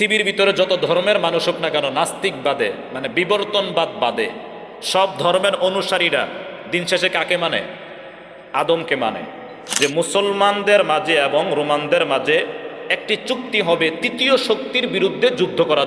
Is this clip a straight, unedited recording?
no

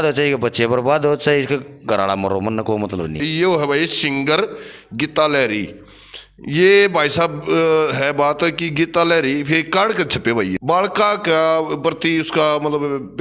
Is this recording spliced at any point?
yes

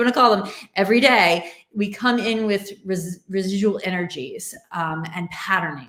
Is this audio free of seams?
yes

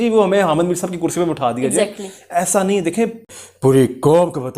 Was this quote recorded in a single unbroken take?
no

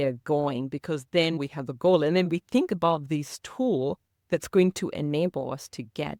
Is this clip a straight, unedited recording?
yes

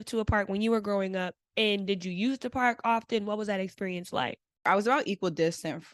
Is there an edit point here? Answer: yes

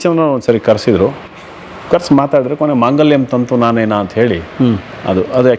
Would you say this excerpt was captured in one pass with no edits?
yes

